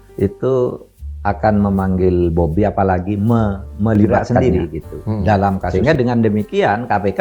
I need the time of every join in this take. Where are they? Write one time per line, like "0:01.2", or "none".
0:05.7